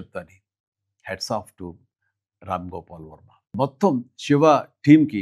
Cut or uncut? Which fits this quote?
cut